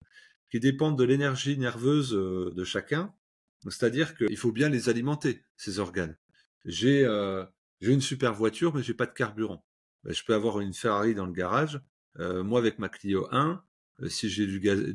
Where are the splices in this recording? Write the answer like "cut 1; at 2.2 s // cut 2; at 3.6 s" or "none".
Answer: cut 1; at 4.3 s